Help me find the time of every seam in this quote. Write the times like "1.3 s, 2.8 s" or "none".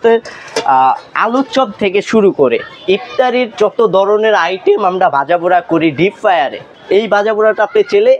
6.7 s